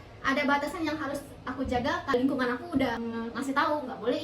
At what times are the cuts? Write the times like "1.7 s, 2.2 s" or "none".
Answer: 2.1 s, 3.0 s